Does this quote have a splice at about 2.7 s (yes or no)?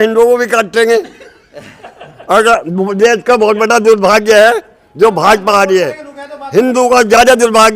no